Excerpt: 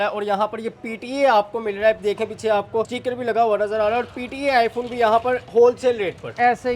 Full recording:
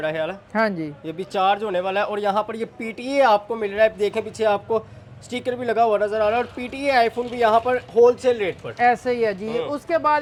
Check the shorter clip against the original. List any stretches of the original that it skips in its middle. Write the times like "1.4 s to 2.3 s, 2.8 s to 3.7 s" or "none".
4.9 s to 5.3 s